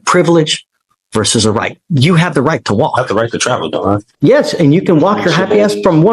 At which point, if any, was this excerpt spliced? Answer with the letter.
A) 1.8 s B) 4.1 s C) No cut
B